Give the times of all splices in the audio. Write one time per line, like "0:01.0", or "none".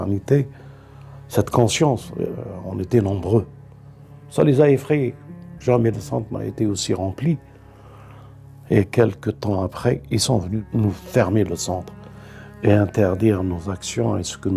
0:10.6